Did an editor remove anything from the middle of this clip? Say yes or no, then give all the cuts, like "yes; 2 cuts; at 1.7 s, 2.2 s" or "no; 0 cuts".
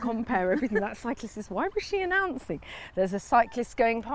no; 0 cuts